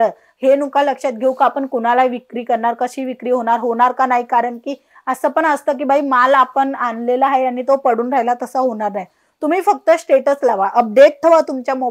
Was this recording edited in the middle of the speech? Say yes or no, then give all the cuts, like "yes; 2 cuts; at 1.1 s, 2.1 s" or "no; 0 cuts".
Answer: no; 0 cuts